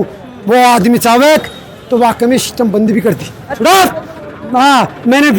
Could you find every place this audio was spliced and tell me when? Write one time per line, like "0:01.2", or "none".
0:03.4